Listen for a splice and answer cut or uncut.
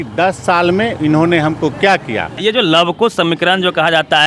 cut